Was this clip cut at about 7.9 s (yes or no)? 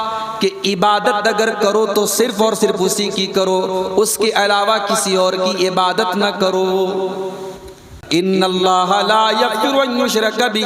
yes